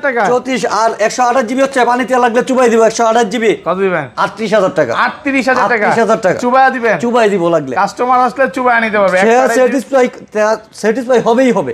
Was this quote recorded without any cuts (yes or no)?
yes